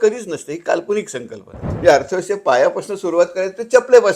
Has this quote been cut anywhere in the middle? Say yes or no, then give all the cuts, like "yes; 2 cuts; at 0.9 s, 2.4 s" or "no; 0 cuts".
yes; 1 cut; at 1.7 s